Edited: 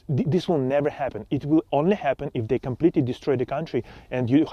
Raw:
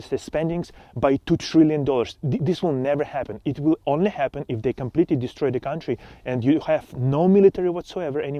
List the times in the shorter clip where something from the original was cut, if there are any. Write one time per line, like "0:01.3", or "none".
none